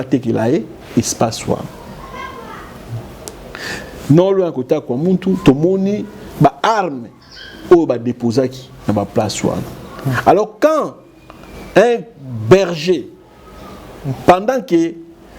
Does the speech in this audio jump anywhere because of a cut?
no; 0 cuts

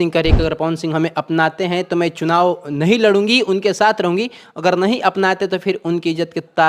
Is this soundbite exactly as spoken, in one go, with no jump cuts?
yes; 0 cuts

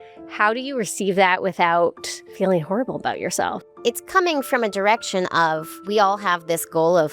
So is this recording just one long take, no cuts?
no; 2 cuts; at 2.3 s, 3.5 s

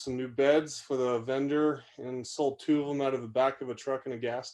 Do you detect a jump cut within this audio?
no; 0 cuts

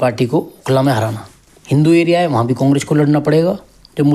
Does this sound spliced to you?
yes; 1 cut; at 1.7 s

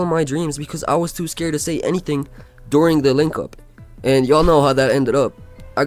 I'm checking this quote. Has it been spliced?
no; 0 cuts

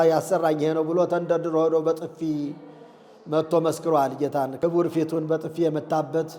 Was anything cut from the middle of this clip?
yes; 1 cut; at 4.5 s

